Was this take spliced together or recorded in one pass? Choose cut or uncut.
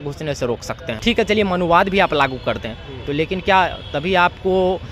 cut